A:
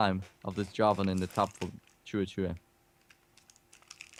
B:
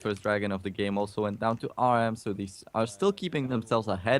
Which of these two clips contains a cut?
B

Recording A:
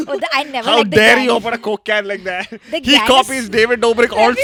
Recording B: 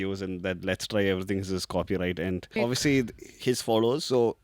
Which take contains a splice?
B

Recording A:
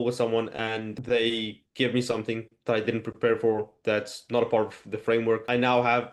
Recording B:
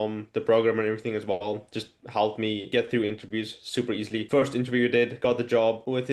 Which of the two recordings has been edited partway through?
A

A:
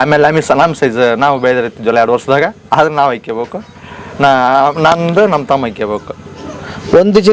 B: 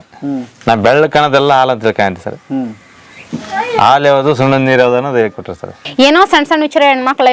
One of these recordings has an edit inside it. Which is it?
B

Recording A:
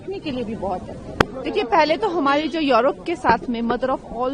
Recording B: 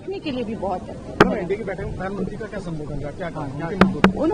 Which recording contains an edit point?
B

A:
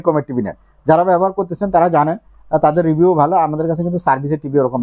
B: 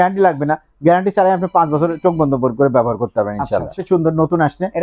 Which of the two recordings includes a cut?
B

